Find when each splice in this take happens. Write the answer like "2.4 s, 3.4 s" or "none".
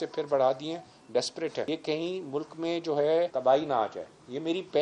1.7 s, 3.3 s